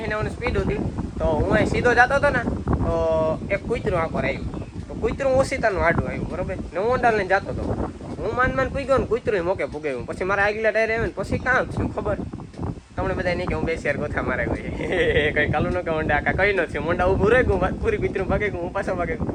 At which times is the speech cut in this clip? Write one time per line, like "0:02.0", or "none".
none